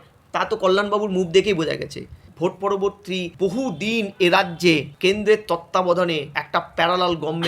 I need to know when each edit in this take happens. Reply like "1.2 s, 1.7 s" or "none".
2.3 s, 3.3 s, 4.9 s, 6.3 s